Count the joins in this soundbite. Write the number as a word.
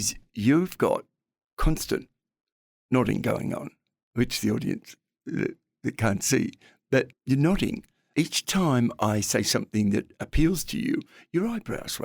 two